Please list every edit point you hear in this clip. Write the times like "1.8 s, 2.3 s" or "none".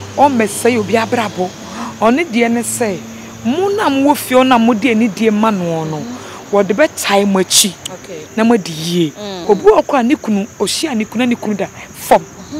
9.3 s